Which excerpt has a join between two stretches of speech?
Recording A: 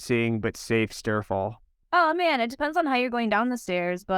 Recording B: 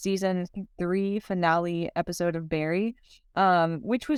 A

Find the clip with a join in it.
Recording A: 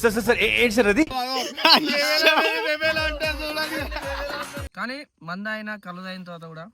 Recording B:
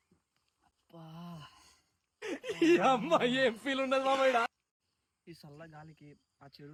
A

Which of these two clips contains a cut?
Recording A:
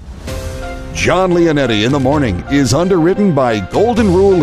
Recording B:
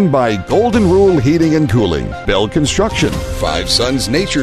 B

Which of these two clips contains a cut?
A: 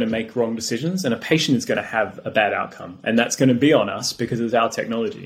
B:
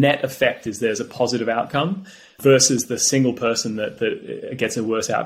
B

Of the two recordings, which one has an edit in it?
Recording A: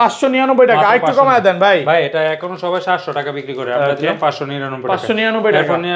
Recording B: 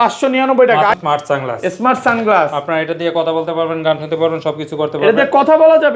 B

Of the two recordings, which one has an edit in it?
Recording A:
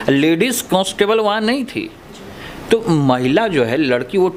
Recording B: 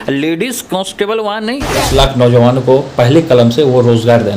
B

